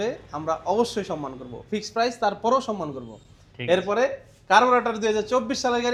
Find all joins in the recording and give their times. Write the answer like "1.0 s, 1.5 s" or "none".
none